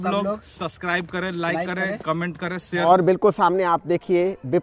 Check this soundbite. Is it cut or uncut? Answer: cut